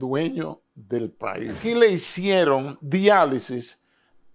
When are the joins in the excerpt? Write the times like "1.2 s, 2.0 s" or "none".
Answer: 1.6 s